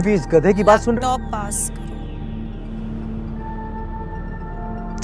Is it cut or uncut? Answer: uncut